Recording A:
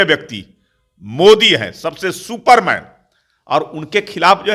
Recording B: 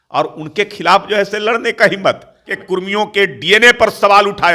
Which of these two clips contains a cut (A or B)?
B